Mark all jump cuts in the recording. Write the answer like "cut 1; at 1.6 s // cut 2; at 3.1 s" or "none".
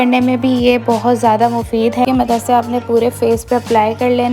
cut 1; at 2.1 s